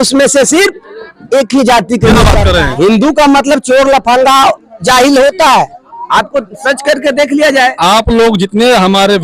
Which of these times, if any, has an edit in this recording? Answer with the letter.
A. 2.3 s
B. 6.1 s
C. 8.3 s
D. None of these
A